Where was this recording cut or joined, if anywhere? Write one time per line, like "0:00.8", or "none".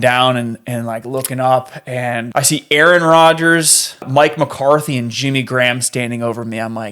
0:02.2
0:04.1